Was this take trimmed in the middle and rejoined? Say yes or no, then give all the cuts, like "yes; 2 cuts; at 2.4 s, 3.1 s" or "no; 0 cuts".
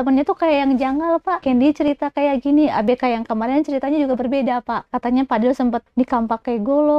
yes; 3 cuts; at 1.4 s, 4.8 s, 5.8 s